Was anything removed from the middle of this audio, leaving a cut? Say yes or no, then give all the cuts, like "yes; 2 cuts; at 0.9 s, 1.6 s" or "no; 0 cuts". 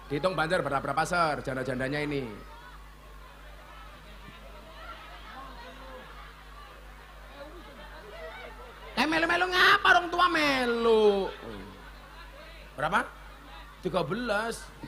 no; 0 cuts